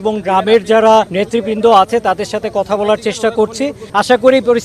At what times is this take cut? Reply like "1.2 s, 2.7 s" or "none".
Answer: 1.1 s, 3.8 s